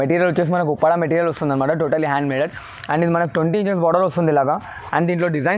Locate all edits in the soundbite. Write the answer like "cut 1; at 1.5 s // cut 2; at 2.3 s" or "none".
none